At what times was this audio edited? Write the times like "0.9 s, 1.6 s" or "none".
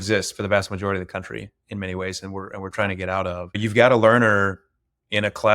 3.6 s

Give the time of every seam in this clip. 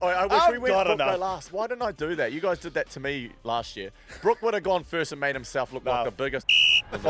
none

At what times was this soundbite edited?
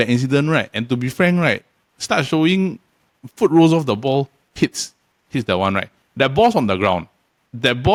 none

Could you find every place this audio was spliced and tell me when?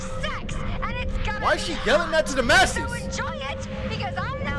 none

